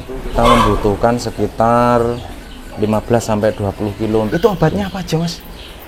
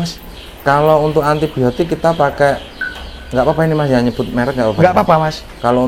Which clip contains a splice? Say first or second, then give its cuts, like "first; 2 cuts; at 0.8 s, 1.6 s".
first; 1 cut; at 4.3 s